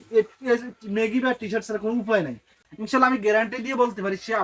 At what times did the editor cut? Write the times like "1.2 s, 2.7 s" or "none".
2.7 s